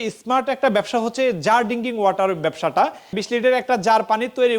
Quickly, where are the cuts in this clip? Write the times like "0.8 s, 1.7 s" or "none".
3.2 s